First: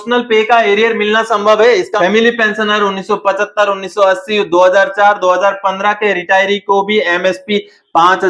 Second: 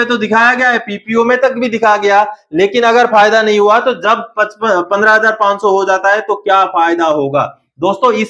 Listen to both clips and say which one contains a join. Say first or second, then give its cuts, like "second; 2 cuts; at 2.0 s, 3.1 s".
first; 1 cut; at 1.9 s